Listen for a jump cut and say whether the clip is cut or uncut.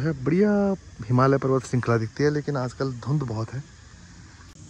uncut